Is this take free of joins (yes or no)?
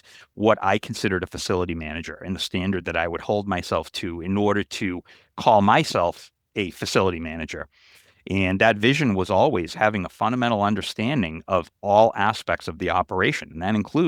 yes